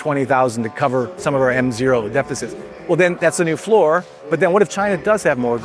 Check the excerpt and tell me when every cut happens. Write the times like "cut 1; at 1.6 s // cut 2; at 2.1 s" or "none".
none